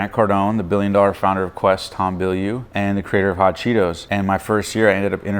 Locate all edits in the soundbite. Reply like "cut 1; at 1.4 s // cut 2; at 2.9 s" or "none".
cut 1; at 2.6 s // cut 2; at 4.0 s